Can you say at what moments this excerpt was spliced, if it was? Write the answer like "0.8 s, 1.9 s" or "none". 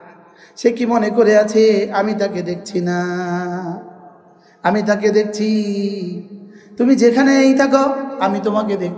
none